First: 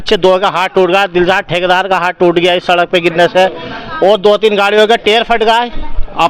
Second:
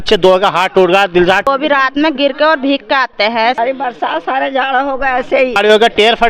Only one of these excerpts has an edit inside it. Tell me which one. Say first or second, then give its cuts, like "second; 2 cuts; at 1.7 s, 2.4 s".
second; 3 cuts; at 1.5 s, 3.6 s, 5.6 s